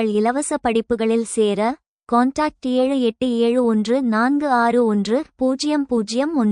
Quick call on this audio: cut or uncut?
cut